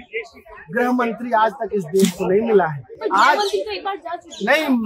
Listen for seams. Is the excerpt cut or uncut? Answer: uncut